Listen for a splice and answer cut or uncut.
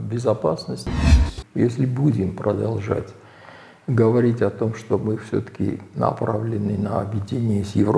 cut